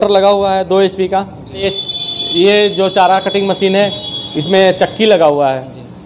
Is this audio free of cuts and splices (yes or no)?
no